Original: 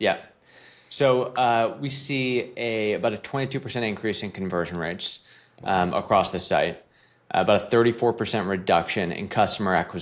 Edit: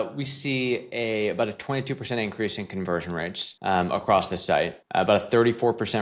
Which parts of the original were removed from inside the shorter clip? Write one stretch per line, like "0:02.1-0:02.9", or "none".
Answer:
0:05.1-0:05.5
0:06.8-0:07.2